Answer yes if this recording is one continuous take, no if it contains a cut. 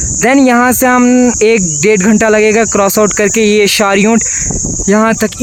yes